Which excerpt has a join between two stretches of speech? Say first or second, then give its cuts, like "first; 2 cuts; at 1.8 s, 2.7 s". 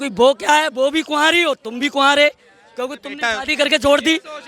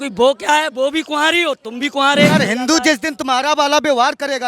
second; 1 cut; at 2.3 s